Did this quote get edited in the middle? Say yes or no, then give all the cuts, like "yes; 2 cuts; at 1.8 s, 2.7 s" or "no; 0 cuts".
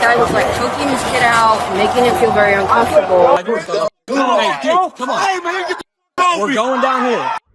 yes; 1 cut; at 3.4 s